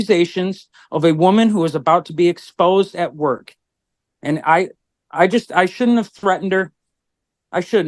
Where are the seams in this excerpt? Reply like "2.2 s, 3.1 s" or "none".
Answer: none